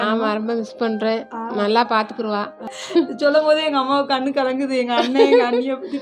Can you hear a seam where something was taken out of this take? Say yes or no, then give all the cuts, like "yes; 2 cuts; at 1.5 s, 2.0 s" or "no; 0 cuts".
yes; 1 cut; at 2.8 s